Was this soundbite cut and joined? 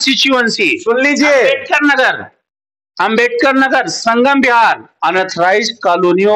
yes; 1 cut; at 4.9 s

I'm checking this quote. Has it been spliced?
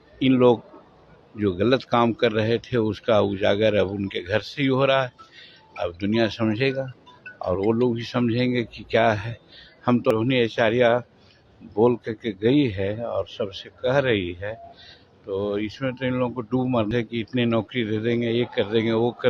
yes; 2 cuts; at 10.1 s, 16.9 s

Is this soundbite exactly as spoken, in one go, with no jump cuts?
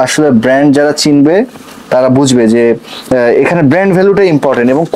yes; 0 cuts

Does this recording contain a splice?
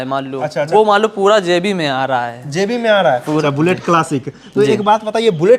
yes; 1 cut; at 3.4 s

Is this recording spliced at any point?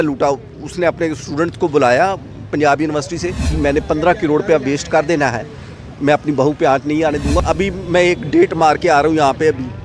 yes; 2 cuts; at 3.5 s, 7.4 s

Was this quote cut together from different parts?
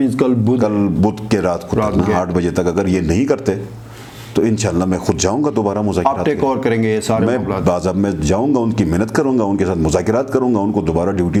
no; 0 cuts

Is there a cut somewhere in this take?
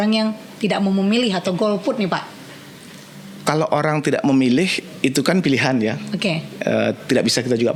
no; 0 cuts

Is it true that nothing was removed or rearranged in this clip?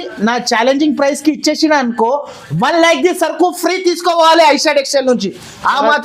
yes; 0 cuts

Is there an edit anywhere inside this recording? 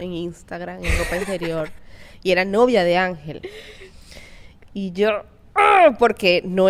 no; 0 cuts

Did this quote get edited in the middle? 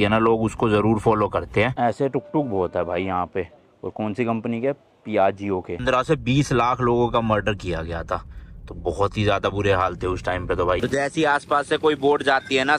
yes; 3 cuts; at 1.7 s, 5.8 s, 10.8 s

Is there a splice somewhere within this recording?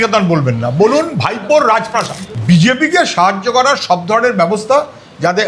yes; 1 cut; at 2.2 s

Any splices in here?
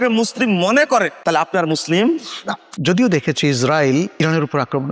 yes; 3 cuts; at 1.1 s, 2.7 s, 4.1 s

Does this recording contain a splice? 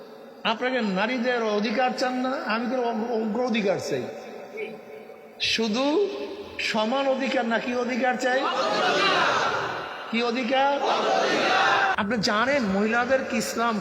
yes; 1 cut; at 11.9 s

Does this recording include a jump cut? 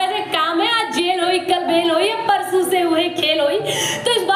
no; 0 cuts

